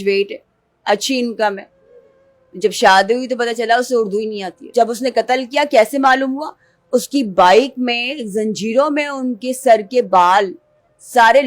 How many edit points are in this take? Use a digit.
1